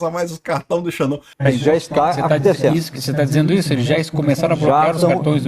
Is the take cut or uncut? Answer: cut